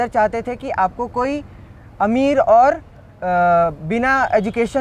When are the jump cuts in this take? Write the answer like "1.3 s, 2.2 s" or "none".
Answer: none